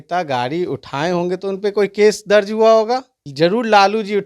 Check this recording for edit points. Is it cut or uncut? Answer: cut